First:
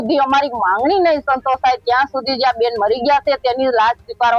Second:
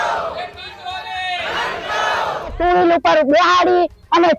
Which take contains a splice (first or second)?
second